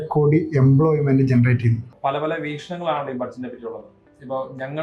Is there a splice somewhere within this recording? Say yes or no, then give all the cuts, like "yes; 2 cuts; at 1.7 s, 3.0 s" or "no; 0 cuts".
yes; 1 cut; at 1.9 s